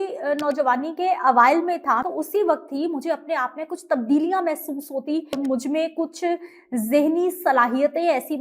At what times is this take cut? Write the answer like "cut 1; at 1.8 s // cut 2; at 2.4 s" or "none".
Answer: cut 1; at 2.0 s // cut 2; at 5.4 s